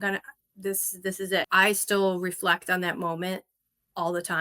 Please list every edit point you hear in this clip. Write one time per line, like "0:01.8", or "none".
0:01.5

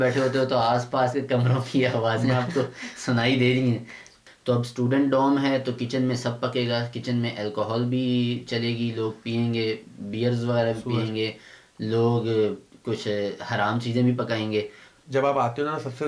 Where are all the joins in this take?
0:04.1
0:15.0

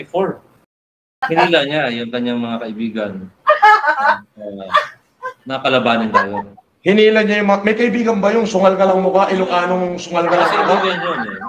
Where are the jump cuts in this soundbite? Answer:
0:01.1

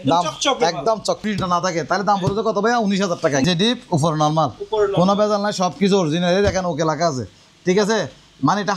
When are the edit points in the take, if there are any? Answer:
0:01.2
0:03.4

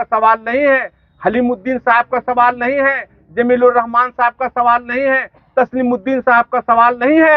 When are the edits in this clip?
none

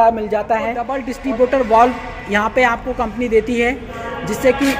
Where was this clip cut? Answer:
0:01.1

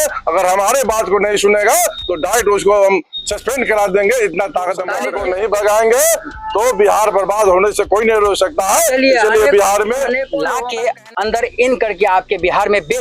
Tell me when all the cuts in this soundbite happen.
0:05.1
0:10.3

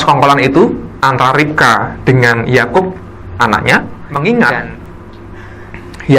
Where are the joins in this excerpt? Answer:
0:04.0

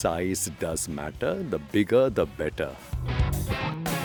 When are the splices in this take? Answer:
none

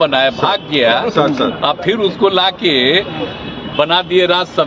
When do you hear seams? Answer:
none

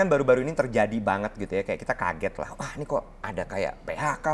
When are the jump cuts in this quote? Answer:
none

